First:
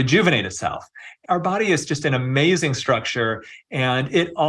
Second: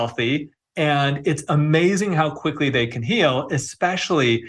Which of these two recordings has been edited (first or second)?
first